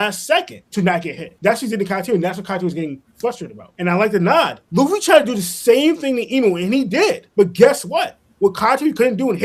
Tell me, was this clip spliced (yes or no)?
no